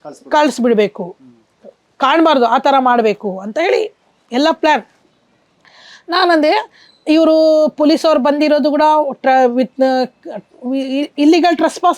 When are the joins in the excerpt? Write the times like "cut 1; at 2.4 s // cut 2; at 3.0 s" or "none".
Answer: none